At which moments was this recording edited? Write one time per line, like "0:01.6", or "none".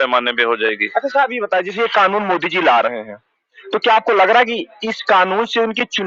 none